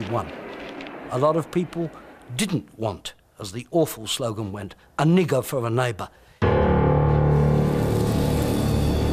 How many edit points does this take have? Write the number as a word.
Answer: one